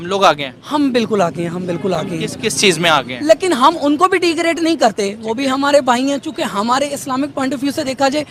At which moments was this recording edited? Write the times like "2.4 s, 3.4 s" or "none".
none